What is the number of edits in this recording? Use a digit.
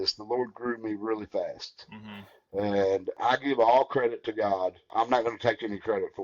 2